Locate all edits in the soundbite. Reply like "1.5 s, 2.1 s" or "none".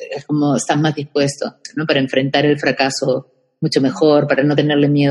1.7 s